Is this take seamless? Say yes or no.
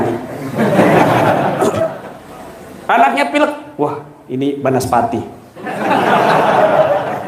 no